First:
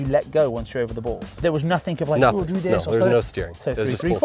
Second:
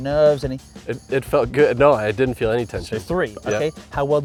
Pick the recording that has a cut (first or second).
first